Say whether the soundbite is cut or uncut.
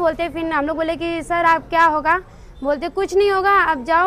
uncut